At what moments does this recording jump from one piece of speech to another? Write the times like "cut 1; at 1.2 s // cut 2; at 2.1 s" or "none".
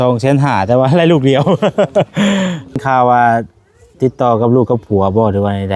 cut 1; at 2.8 s